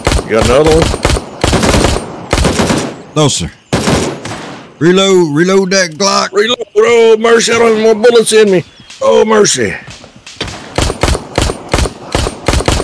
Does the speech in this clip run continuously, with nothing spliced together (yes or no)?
yes